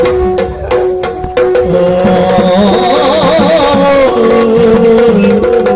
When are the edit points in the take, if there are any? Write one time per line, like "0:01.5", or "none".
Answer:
none

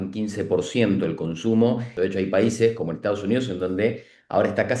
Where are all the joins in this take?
0:01.9

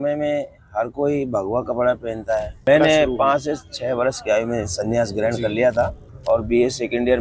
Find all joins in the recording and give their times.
0:02.7
0:06.1

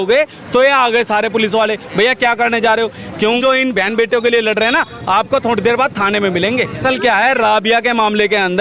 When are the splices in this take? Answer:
0:03.4
0:06.8

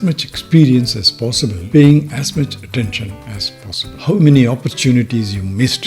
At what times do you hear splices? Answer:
0:03.9

